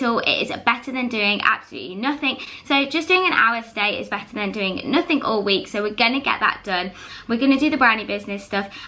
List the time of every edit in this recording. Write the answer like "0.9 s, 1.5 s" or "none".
none